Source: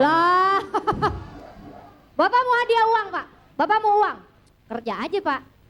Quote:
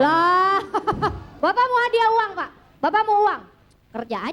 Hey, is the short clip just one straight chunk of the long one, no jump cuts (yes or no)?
no